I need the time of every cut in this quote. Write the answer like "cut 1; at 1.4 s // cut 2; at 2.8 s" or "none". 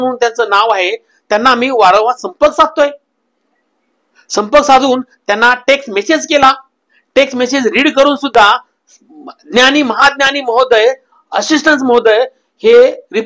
none

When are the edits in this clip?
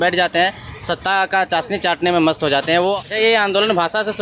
cut 1; at 2.9 s

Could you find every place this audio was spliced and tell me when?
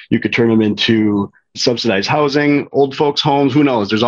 cut 1; at 1.6 s // cut 2; at 2.7 s

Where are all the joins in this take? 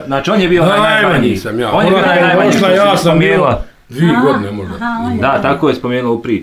none

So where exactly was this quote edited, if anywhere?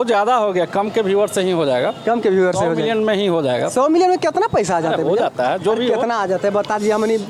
none

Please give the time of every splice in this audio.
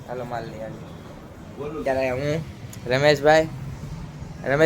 cut 1; at 1.8 s

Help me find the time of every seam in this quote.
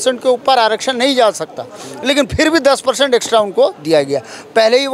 none

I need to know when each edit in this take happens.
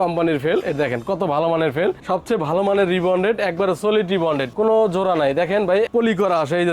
cut 1; at 2.0 s // cut 2; at 4.5 s // cut 3; at 5.9 s

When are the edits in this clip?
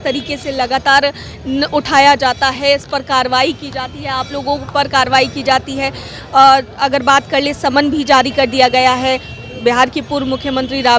none

